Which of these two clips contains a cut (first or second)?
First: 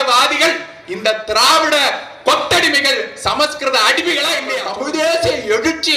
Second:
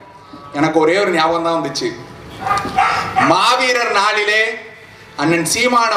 first